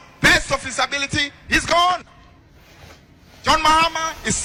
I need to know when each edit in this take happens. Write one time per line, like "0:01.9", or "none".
none